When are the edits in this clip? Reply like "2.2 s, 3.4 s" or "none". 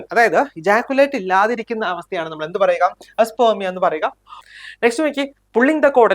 4.3 s